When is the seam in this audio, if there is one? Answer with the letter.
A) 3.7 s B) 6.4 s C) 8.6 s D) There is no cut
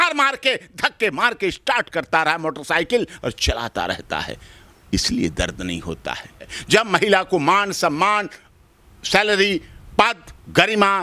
B